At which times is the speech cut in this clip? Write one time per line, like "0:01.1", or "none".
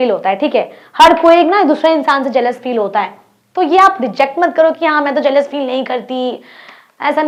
none